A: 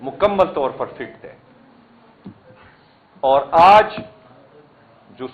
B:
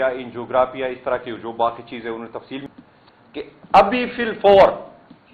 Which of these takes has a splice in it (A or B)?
B